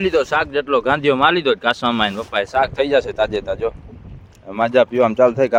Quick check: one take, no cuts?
yes; 0 cuts

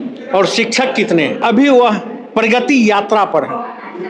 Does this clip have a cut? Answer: yes; 1 cut; at 1.4 s

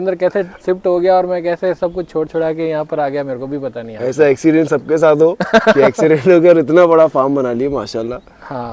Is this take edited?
no; 0 cuts

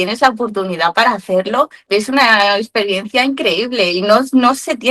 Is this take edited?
yes; 1 cut; at 1.8 s

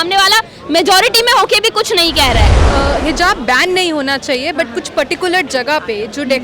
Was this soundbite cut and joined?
yes; 1 cut; at 2.6 s

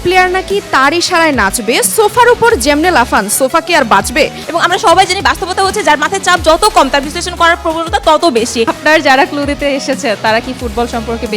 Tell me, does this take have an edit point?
yes; 2 cuts; at 4.4 s, 8.7 s

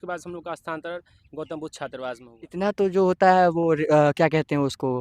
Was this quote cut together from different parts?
yes; 1 cut; at 2.3 s

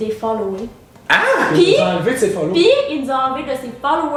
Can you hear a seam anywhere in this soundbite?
no; 0 cuts

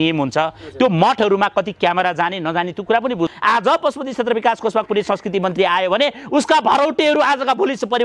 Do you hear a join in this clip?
yes; 1 cut; at 3.3 s

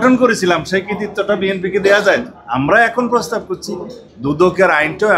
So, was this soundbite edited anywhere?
yes; 1 cut; at 2.4 s

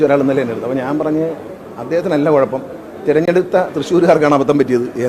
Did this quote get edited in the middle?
no; 0 cuts

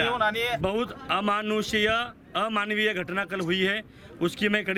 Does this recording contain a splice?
no; 0 cuts

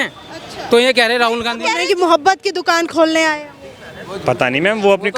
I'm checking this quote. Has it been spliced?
yes; 1 cut; at 1.8 s

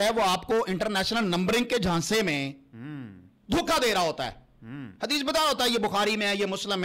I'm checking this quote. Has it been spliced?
no; 0 cuts

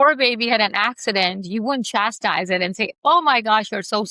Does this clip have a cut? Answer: no; 0 cuts

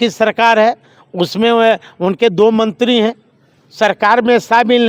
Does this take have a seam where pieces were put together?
no; 0 cuts

